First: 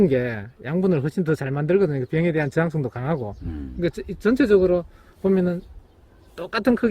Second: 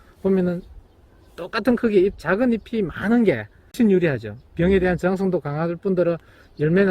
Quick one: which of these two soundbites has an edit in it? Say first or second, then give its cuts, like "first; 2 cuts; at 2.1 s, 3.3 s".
second; 1 cut; at 3.8 s